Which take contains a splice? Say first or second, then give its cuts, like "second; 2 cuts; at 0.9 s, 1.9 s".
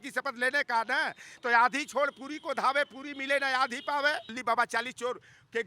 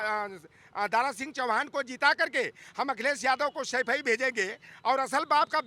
first; 1 cut; at 4.3 s